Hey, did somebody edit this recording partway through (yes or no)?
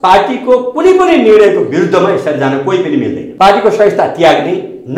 yes